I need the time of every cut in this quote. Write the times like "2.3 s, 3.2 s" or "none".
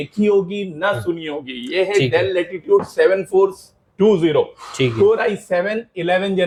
none